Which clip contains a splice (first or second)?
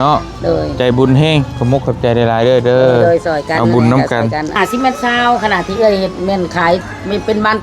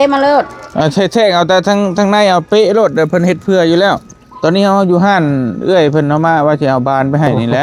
first